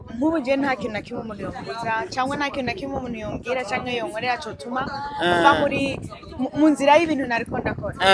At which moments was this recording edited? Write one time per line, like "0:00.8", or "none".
none

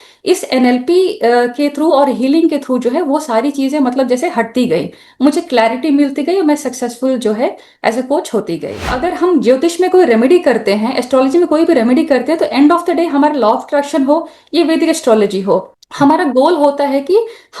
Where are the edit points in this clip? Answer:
0:08.9

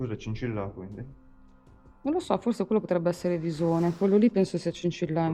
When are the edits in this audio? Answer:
none

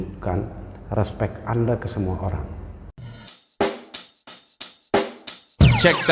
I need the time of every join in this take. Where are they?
0:02.9

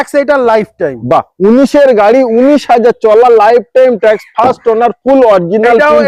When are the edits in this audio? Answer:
none

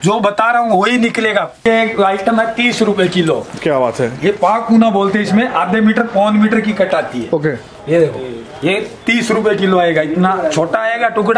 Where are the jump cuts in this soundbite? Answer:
0:01.6

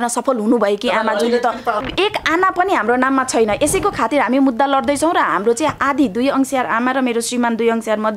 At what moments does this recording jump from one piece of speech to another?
0:01.8

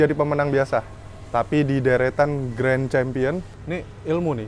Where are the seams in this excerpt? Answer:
0:03.5

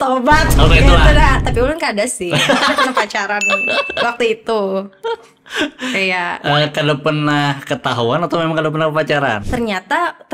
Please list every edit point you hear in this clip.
0:09.4

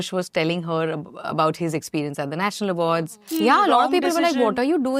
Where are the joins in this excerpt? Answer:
0:03.2

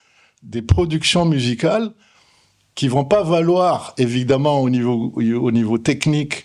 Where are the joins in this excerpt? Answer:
none

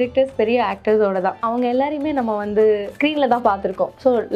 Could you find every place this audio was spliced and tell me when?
0:01.4
0:02.9

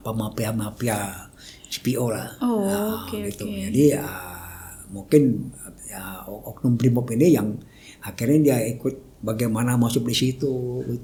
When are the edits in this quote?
none

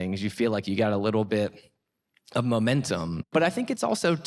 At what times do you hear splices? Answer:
0:03.3

